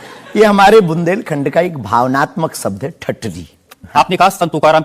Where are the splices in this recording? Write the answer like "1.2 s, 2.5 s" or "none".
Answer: 3.7 s

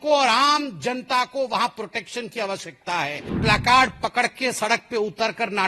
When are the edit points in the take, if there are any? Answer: 3.4 s

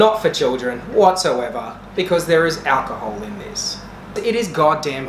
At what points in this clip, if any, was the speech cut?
4.2 s

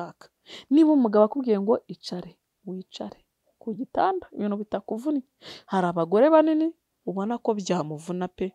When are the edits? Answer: none

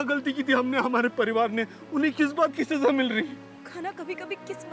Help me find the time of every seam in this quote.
3.5 s

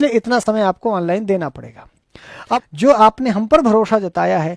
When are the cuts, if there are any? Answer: 2.5 s

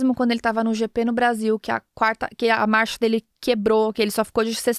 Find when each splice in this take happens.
none

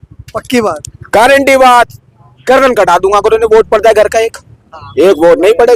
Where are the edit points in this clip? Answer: none

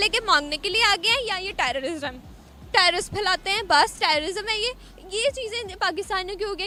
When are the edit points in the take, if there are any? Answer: none

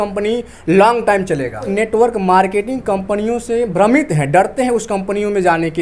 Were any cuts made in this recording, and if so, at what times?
1.7 s

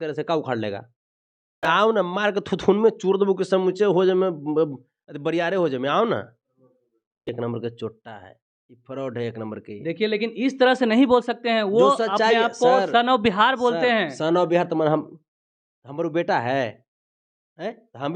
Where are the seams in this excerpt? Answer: 1.6 s, 7.3 s

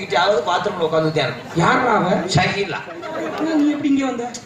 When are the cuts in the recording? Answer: 3.3 s

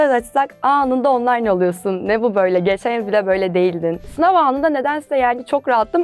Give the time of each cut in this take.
4.0 s

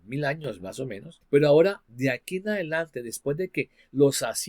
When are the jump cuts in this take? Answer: 1.1 s

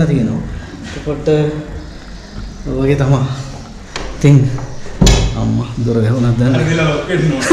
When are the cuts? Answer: none

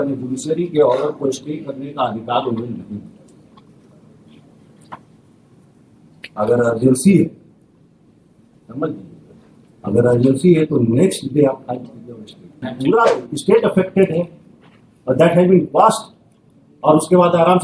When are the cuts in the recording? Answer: 12.6 s

